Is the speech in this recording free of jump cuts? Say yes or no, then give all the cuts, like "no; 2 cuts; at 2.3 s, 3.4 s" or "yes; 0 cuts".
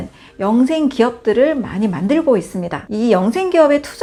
yes; 0 cuts